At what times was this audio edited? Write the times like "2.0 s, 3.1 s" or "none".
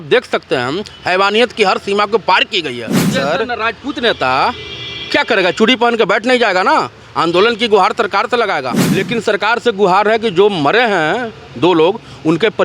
3.1 s, 8.7 s